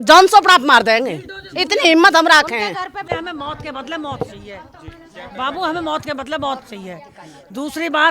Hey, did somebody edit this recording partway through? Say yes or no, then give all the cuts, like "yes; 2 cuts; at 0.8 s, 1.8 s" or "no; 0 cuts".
yes; 1 cut; at 3.1 s